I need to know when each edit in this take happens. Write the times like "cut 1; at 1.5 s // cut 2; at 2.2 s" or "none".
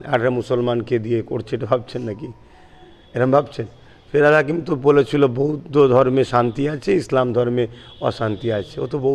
none